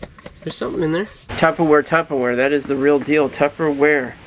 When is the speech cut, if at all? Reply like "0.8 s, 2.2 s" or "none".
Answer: 1.3 s